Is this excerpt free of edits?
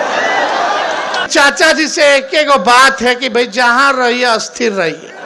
no; 1 cut; at 1.3 s

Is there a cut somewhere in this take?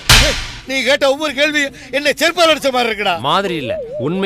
no; 0 cuts

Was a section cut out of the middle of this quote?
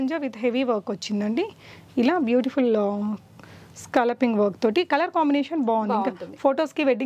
no; 0 cuts

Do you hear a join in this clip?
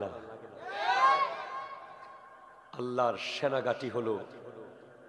no; 0 cuts

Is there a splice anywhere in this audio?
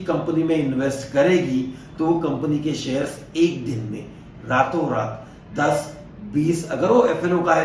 no; 0 cuts

